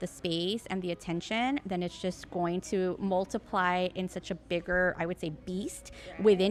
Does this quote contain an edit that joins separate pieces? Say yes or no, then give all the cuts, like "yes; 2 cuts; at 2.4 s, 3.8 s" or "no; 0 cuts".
no; 0 cuts